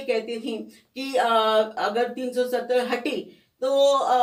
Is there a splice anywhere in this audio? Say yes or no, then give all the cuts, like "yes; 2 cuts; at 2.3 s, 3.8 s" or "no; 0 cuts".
no; 0 cuts